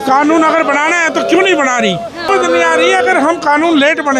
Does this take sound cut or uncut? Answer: cut